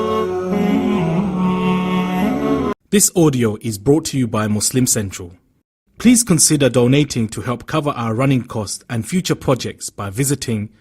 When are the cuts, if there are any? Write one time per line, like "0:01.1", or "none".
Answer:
0:02.7